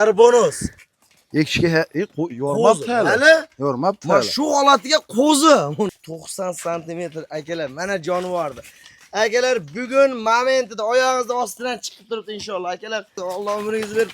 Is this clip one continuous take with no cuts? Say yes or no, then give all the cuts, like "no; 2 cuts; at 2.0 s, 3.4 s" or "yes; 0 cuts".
no; 2 cuts; at 6.0 s, 13.2 s